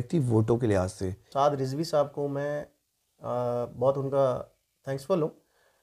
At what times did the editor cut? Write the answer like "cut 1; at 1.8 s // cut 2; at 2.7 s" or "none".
cut 1; at 1.2 s